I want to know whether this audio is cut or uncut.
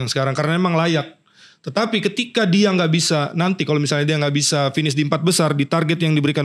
uncut